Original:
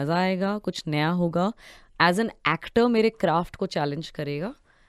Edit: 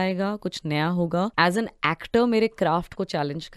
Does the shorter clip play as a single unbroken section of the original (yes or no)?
no